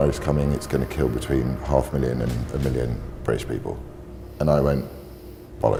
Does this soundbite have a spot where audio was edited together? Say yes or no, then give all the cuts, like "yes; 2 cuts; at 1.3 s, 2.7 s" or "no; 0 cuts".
no; 0 cuts